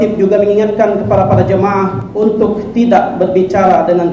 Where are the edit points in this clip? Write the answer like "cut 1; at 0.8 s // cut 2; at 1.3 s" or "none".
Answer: cut 1; at 2.0 s